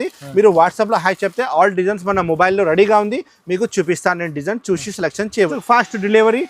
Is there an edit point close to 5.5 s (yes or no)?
yes